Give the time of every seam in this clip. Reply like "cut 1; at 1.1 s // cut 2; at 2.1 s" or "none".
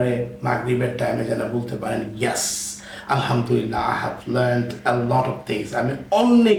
none